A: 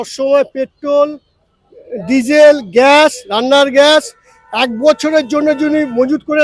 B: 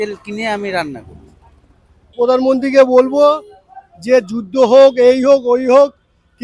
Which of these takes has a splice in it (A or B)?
B